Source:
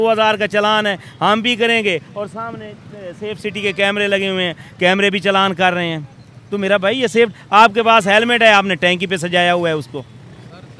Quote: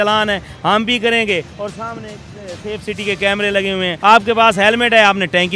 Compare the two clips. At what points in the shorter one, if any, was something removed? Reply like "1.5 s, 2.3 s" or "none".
3.9 s